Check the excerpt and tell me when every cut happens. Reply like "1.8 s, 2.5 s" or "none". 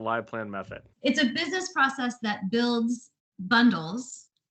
none